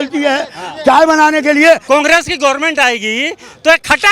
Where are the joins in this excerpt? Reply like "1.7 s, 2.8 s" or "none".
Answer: 1.8 s